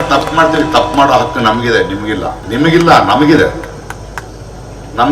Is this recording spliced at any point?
yes; 1 cut; at 2.4 s

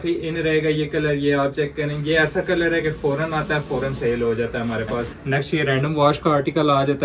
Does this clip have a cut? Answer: yes; 1 cut; at 5.1 s

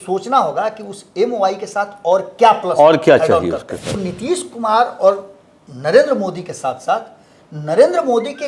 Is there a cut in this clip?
yes; 1 cut; at 4.1 s

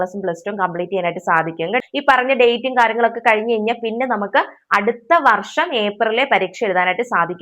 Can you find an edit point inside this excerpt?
yes; 1 cut; at 1.8 s

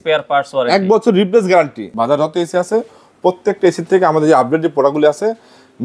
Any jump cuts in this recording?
yes; 1 cut; at 1.8 s

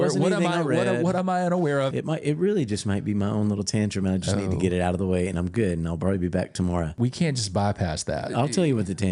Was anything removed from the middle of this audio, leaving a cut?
yes; 3 cuts; at 1.9 s, 6.9 s, 8.3 s

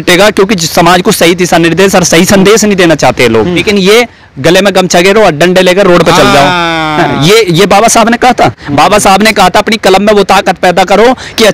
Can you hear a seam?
yes; 1 cut; at 3.6 s

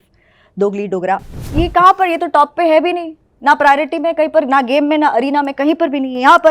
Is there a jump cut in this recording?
yes; 1 cut; at 1.4 s

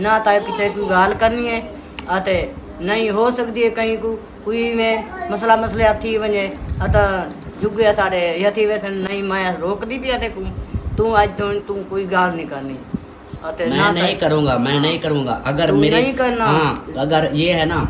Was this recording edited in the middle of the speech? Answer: no; 0 cuts

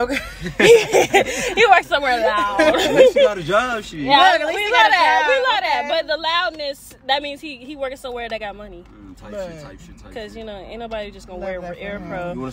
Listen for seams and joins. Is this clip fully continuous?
yes; 0 cuts

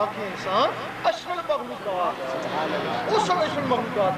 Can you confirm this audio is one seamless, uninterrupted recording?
yes; 0 cuts

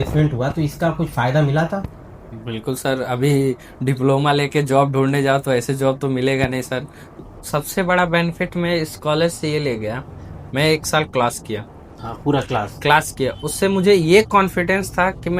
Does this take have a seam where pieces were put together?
yes; 1 cut; at 7.2 s

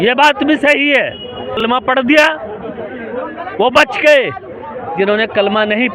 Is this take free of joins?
no; 1 cut; at 1.6 s

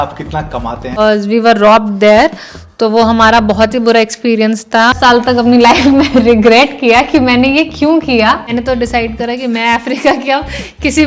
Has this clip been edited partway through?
yes; 3 cuts; at 1.0 s, 5.4 s, 8.4 s

